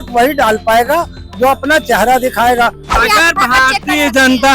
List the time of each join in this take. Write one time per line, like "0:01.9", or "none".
0:02.9